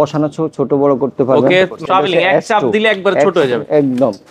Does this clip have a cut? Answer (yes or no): yes